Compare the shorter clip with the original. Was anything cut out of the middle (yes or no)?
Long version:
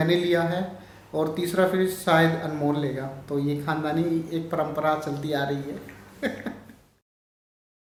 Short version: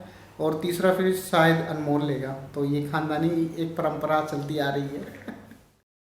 yes